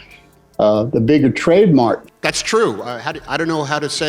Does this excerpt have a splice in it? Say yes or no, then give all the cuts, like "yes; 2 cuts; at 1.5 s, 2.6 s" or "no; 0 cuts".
yes; 1 cut; at 2.1 s